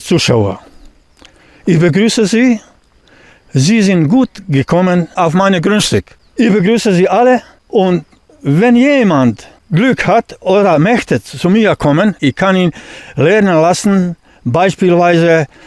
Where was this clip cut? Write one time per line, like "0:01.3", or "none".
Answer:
0:05.1
0:06.2
0:07.6
0:09.5
0:12.2